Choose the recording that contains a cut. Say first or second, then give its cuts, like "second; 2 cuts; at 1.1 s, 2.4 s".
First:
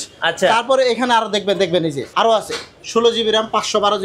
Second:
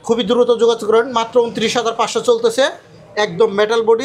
first; 1 cut; at 2.0 s